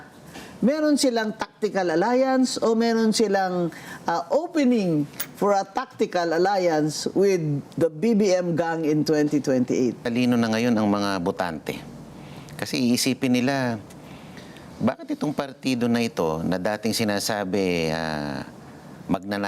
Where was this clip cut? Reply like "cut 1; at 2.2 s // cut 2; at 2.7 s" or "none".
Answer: cut 1; at 10.0 s